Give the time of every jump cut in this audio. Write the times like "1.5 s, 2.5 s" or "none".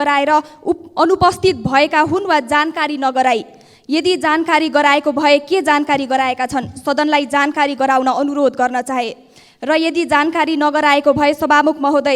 none